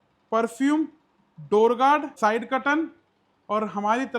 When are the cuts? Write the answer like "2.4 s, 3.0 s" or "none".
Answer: 2.2 s